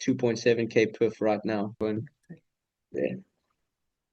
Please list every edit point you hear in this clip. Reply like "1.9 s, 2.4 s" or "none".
1.8 s